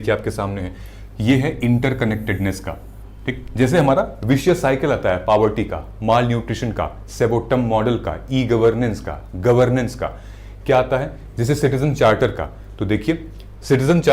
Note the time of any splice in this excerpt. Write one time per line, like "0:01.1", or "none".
none